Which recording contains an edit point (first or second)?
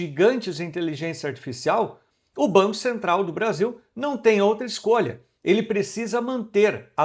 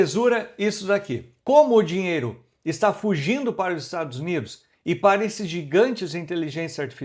second